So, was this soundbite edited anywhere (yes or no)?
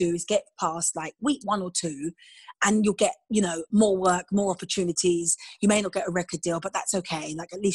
no